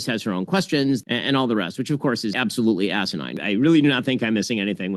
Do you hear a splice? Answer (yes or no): yes